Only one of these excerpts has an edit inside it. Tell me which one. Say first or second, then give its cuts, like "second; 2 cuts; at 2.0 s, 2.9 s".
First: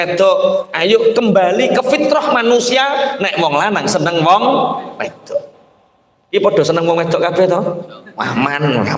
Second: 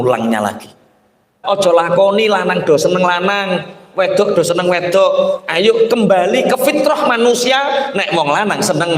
second; 1 cut; at 1.4 s